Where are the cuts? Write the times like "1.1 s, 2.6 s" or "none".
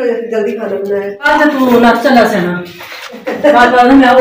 1.3 s

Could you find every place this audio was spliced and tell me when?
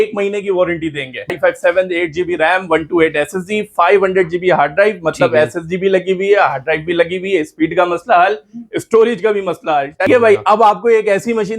1.3 s, 10.1 s

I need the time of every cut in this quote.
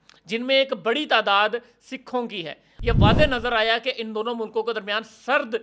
2.7 s

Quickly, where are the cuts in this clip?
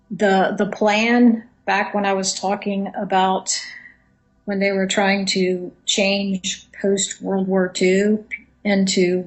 4.7 s

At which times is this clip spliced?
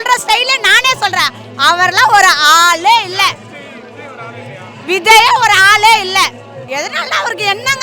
none

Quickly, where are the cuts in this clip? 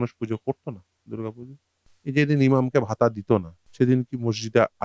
1.9 s, 3.6 s

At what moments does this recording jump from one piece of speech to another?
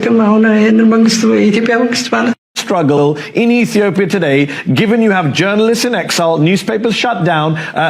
2.6 s

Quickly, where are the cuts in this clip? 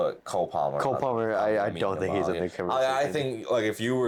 none

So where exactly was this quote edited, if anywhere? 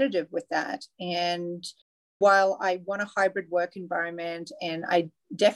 none

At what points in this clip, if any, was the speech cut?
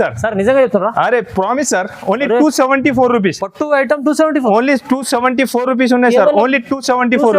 none

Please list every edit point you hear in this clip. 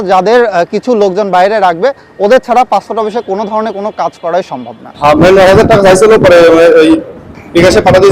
4.8 s

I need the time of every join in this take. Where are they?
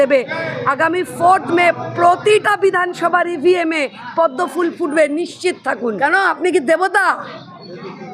5.7 s

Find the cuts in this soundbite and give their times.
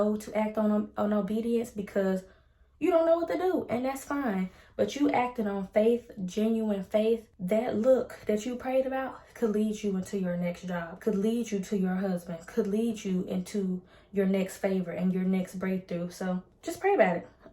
7.3 s, 10.9 s, 16.5 s

